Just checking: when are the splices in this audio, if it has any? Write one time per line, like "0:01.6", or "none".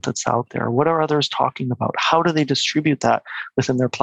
none

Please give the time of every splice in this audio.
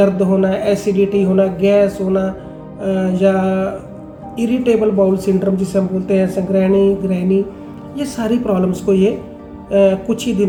none

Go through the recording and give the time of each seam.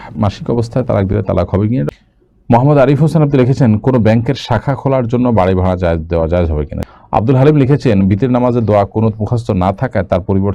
0:01.9
0:06.8

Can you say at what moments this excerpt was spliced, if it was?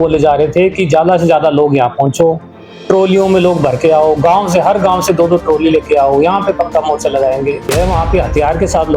0:07.7

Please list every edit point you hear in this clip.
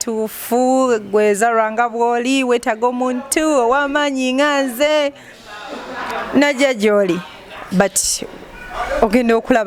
none

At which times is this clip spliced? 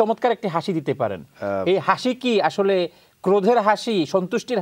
none

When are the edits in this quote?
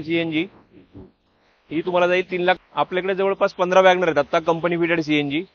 0:02.6

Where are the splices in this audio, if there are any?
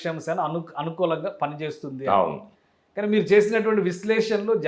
none

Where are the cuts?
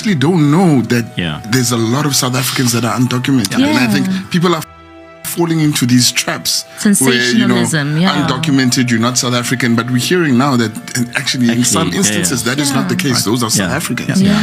none

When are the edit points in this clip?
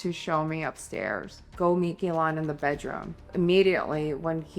0:01.5
0:03.3

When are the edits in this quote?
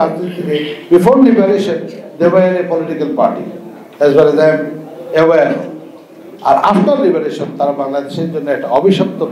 none

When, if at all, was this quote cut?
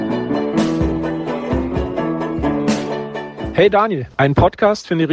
0:03.4

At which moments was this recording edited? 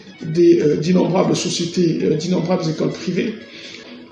none

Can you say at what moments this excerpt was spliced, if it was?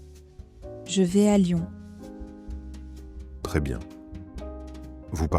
0:00.9

